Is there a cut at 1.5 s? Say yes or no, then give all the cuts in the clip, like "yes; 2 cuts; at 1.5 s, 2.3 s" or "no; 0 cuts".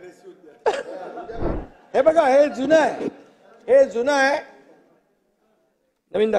yes; 1 cut; at 1.5 s